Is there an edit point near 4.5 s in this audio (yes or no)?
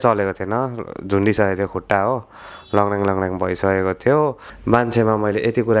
yes